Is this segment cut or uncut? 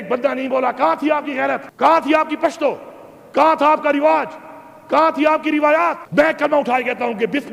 cut